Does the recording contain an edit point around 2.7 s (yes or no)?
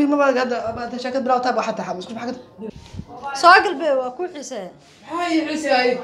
yes